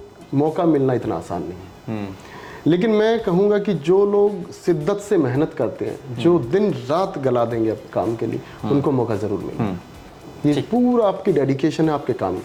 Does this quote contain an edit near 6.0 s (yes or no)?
no